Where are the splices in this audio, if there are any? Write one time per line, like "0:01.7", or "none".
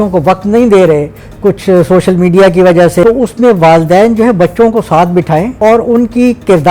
0:03.0
0:05.5